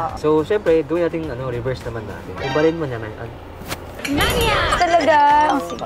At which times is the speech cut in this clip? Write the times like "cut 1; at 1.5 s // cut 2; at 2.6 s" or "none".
cut 1; at 4.8 s

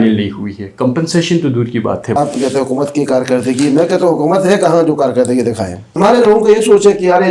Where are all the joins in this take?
cut 1; at 2.2 s // cut 2; at 5.9 s

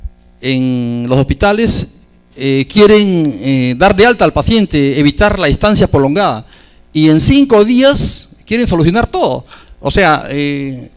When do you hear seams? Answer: none

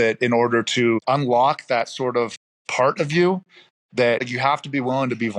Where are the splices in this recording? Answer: cut 1; at 1.0 s // cut 2; at 4.3 s

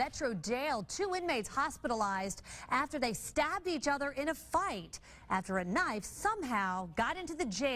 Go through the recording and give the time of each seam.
none

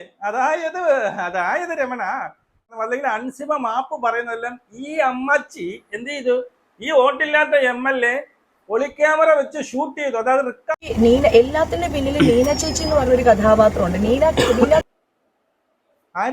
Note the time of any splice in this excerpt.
cut 1; at 2.7 s // cut 2; at 10.6 s

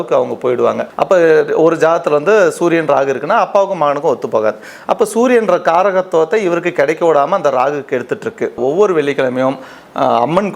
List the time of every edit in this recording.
cut 1; at 0.9 s // cut 2; at 8.6 s

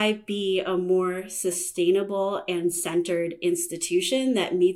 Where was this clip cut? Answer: none

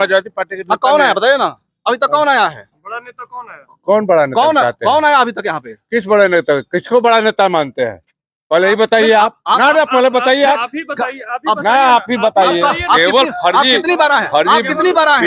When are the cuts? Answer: none

